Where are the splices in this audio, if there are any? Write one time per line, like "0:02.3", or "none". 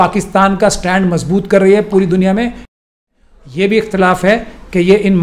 0:02.8